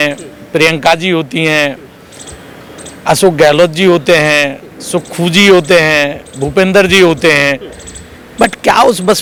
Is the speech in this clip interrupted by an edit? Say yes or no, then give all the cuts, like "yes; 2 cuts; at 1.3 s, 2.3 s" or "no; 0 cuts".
no; 0 cuts